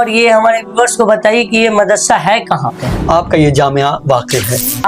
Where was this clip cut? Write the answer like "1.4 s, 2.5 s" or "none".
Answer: 3.0 s